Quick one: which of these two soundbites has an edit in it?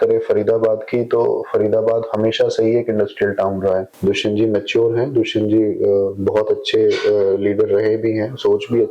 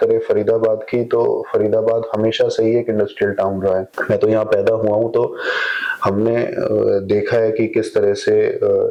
first; 1 cut; at 3.9 s

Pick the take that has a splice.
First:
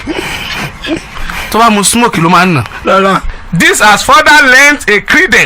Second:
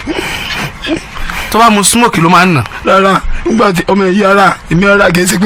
first; 1 cut; at 3.3 s

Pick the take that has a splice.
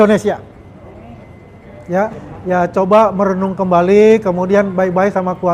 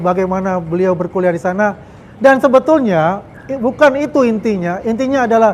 first; 1 cut; at 2.3 s

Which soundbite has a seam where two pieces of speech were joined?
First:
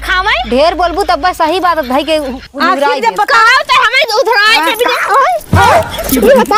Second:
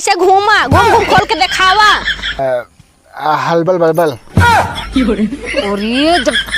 second; 1 cut; at 2.4 s

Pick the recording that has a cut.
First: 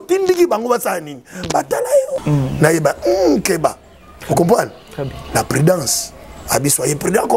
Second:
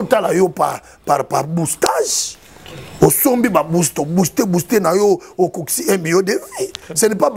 first; 1 cut; at 2.2 s

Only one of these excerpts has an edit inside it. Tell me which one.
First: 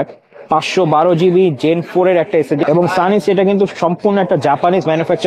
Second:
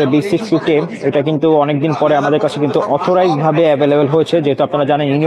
first; 1 cut; at 2.6 s

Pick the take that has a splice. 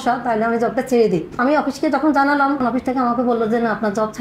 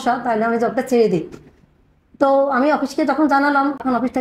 first; 2 cuts; at 1.4 s, 2.6 s

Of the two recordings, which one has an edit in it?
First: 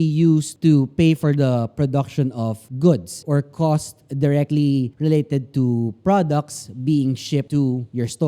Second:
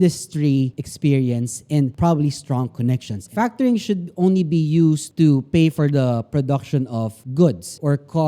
second; 1 cut; at 3.3 s

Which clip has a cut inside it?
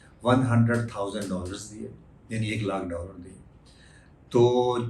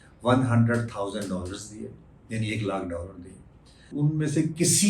second; 1 cut; at 3.8 s

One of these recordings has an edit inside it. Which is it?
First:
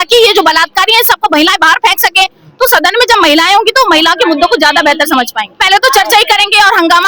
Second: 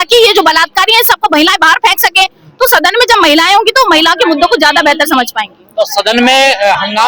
first; 1 cut; at 5.6 s

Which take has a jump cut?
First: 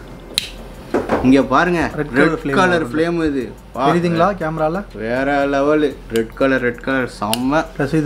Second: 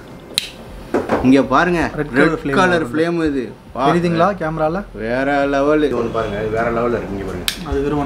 second; 1 cut; at 5.9 s

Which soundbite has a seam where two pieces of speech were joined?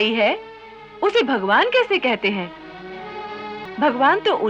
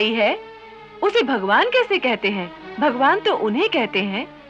second; 1 cut; at 2.6 s

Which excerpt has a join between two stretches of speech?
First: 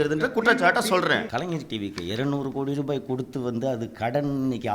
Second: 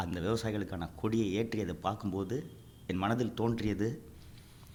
first; 1 cut; at 1.3 s

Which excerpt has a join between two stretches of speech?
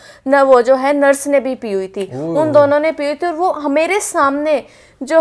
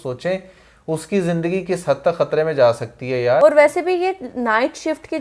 second; 1 cut; at 3.4 s

